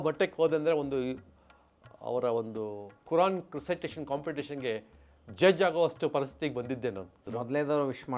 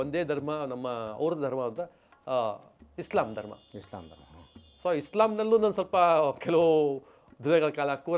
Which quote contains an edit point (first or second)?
first